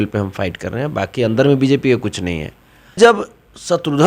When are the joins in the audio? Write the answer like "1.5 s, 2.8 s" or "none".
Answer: 2.9 s